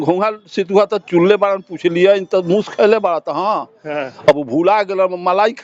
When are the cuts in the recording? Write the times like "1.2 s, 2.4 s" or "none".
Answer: none